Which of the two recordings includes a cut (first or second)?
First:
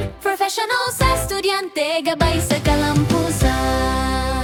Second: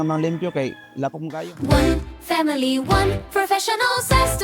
second